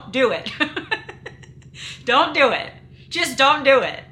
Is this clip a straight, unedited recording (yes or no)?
yes